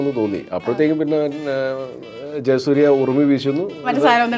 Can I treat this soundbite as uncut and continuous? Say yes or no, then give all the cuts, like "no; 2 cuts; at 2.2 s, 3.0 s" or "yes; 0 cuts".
yes; 0 cuts